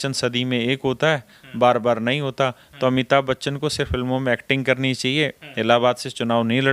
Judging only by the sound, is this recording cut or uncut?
uncut